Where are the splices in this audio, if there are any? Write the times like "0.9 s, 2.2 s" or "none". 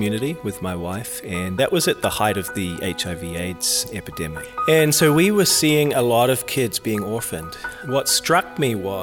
4.5 s, 7.7 s

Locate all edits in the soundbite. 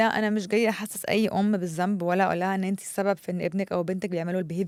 none

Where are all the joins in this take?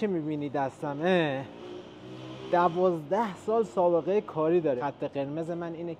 4.8 s

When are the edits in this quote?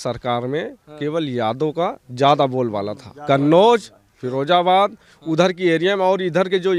none

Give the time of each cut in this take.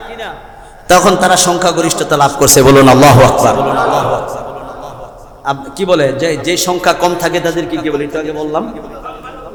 none

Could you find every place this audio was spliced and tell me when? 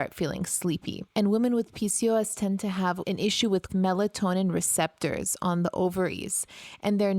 3.0 s

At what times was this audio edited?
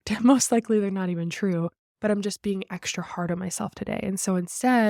none

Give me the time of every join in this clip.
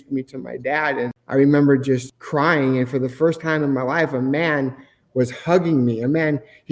1.2 s, 2.2 s

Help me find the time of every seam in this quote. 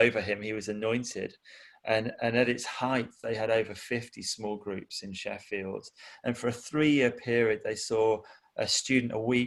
none

